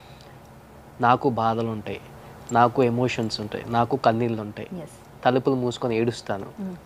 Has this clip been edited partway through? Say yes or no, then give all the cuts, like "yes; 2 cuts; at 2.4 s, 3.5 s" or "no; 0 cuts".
no; 0 cuts